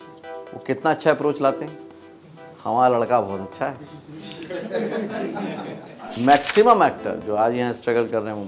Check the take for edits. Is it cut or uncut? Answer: cut